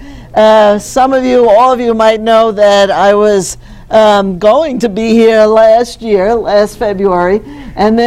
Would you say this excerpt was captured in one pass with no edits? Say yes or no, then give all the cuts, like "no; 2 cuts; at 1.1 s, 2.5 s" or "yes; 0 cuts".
yes; 0 cuts